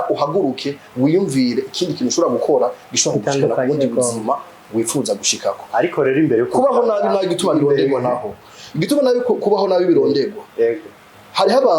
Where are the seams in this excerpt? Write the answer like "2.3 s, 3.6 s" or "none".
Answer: none